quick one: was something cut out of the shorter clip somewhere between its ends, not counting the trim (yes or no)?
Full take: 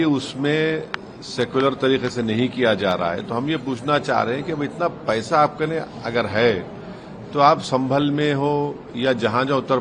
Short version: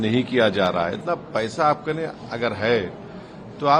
yes